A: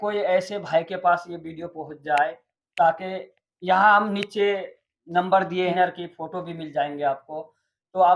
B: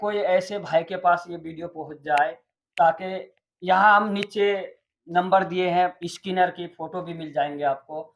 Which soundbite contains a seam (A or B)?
A